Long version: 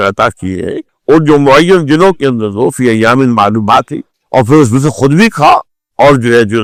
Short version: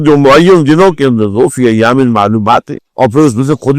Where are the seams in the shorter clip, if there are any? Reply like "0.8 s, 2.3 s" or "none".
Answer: 2.8 s